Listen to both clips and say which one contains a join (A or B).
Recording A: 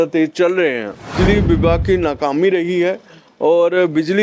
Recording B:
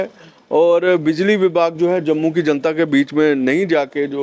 A